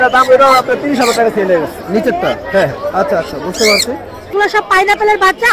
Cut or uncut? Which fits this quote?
cut